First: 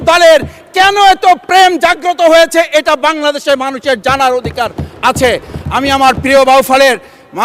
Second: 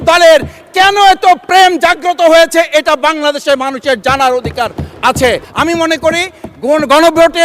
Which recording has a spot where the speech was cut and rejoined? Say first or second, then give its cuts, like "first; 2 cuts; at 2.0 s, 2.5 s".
second; 1 cut; at 5.5 s